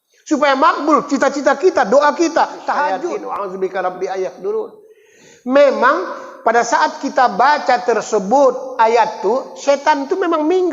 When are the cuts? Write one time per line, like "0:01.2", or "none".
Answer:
0:03.3